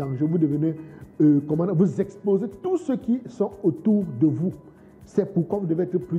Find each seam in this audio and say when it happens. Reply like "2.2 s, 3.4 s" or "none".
none